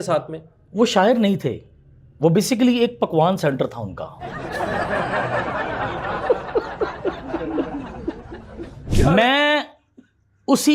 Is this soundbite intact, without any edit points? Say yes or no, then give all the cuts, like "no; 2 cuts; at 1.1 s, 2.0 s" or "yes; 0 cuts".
no; 1 cut; at 9.0 s